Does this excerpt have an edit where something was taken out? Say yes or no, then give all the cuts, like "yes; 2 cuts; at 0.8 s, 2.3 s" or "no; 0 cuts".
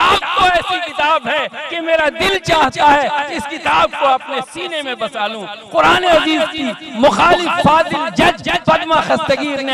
no; 0 cuts